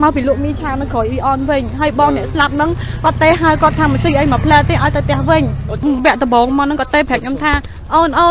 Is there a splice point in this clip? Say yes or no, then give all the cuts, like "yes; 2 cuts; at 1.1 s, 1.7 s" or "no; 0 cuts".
yes; 1 cut; at 5.8 s